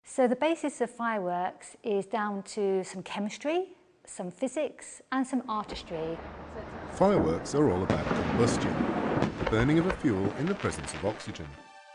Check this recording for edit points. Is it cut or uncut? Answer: uncut